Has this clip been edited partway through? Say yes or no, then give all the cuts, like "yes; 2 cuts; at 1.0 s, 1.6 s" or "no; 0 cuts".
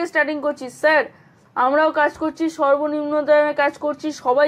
no; 0 cuts